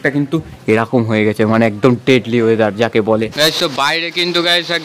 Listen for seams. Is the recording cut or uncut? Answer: cut